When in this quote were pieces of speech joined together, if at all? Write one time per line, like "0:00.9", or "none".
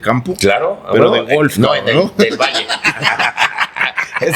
none